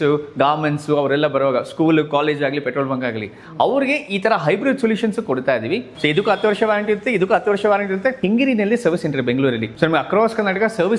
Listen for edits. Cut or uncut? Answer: cut